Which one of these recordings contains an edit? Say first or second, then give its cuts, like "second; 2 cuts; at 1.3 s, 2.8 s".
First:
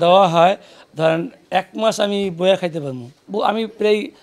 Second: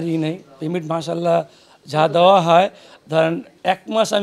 first; 1 cut; at 3.2 s